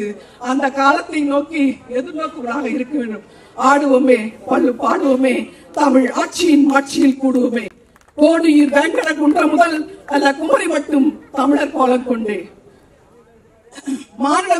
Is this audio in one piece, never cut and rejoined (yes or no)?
yes